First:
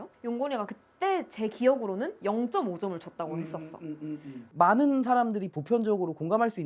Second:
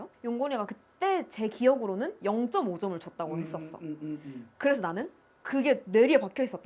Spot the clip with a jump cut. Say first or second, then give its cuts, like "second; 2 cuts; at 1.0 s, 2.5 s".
first; 1 cut; at 4.5 s